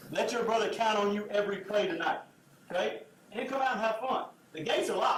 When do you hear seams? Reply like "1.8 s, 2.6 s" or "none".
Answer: none